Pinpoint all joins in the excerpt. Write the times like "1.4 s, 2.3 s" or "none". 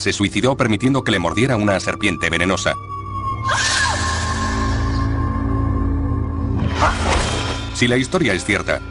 none